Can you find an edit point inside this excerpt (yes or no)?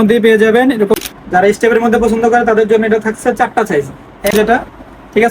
yes